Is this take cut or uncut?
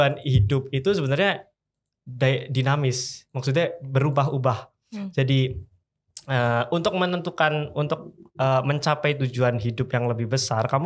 uncut